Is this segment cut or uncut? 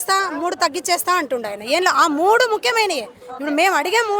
uncut